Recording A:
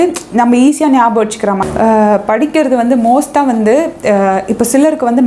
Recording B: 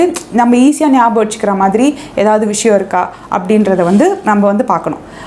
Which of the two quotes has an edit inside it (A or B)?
A